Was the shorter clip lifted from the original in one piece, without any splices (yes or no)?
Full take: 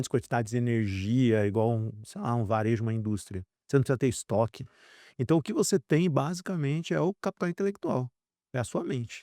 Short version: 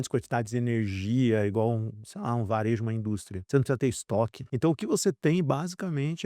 no